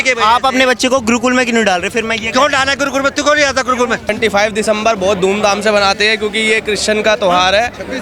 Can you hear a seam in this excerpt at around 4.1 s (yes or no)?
yes